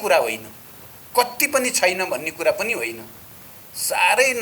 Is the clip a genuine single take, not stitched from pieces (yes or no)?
yes